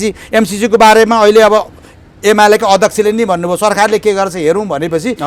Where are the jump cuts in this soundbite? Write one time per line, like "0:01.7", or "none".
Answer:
none